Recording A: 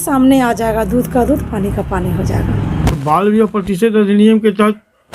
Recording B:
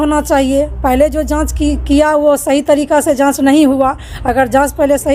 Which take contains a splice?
A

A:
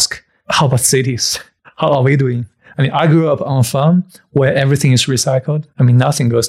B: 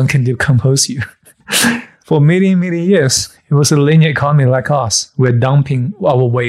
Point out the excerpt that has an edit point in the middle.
B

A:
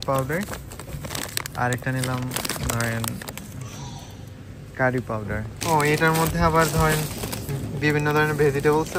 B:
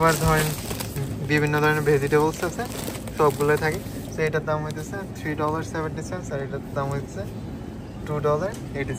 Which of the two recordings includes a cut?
A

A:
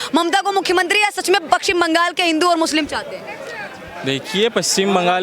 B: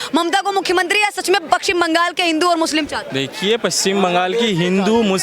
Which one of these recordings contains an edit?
B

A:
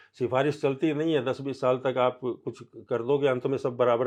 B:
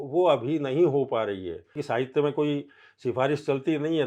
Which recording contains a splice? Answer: B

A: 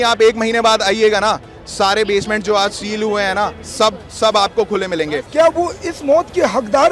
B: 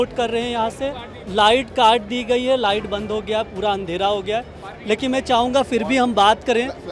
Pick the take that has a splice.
A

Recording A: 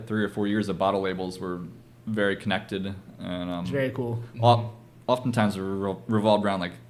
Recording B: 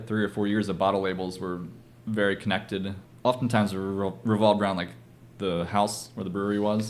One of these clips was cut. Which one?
B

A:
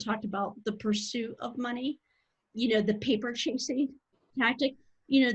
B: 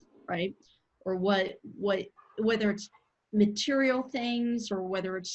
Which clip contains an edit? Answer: A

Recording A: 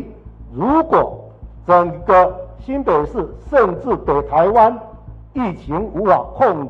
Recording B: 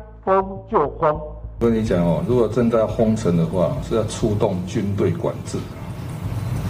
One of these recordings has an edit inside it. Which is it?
B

